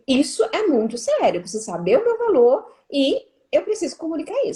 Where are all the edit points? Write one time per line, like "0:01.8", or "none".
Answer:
none